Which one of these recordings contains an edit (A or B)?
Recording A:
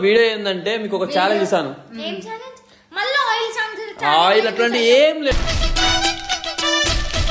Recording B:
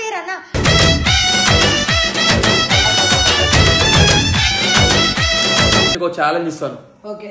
B